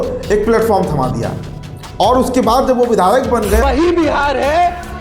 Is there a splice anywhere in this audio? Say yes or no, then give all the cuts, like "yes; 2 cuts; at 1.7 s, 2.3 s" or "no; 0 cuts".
yes; 1 cut; at 3.6 s